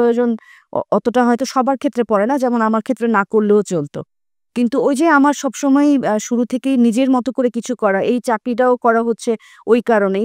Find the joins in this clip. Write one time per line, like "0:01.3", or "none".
none